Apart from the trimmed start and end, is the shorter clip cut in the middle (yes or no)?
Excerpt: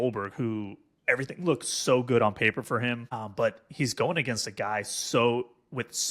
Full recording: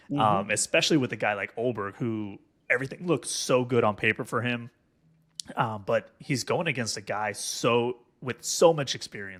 yes